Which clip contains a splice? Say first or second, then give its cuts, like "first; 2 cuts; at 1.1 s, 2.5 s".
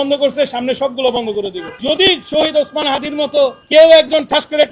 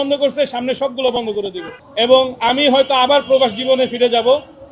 first; 1 cut; at 1.8 s